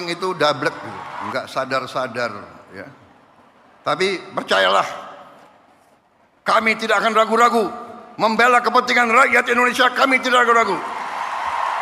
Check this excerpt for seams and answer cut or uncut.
cut